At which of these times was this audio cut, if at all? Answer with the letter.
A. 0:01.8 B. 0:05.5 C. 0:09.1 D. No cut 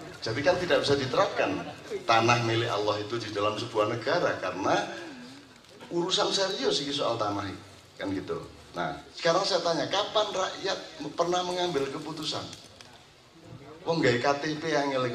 C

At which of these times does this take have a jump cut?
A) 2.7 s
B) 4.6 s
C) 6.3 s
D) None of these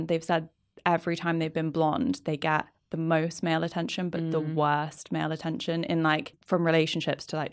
C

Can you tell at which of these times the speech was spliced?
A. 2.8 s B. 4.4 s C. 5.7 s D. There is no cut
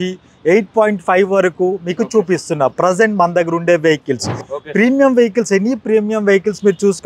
B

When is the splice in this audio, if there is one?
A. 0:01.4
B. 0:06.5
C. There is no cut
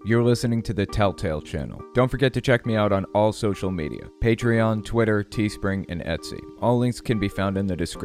C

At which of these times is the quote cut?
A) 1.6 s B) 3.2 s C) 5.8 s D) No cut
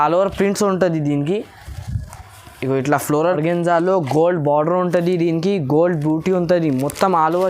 B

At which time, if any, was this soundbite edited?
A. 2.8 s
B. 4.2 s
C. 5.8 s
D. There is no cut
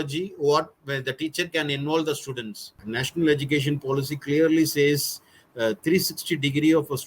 A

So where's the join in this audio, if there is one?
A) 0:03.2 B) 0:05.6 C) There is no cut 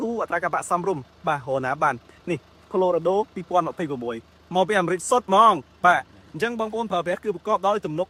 C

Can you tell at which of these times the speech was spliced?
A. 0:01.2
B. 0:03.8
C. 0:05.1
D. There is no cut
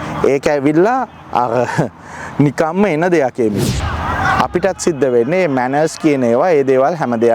B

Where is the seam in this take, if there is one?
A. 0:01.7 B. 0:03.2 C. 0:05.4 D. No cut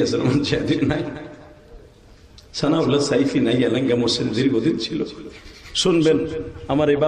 D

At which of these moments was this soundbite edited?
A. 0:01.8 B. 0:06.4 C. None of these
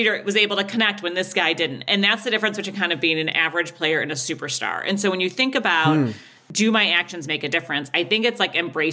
B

